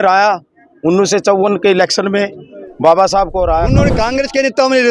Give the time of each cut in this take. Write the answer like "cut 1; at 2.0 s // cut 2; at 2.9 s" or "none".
cut 1; at 3.8 s